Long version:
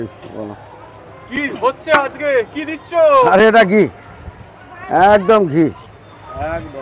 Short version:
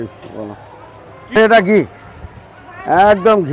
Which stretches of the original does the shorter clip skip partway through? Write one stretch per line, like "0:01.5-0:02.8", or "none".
0:01.4-0:03.4